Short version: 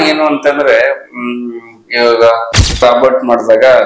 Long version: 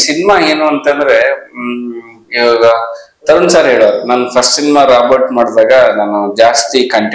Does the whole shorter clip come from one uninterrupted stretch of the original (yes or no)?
no